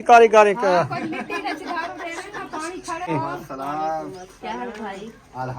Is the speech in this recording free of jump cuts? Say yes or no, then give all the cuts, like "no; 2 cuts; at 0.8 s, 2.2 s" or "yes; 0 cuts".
no; 1 cut; at 3.1 s